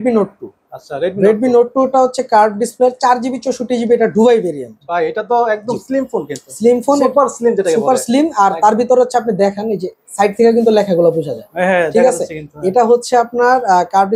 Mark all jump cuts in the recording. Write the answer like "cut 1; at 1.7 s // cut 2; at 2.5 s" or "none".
none